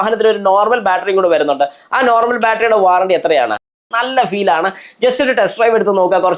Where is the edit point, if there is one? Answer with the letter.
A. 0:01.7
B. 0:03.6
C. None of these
B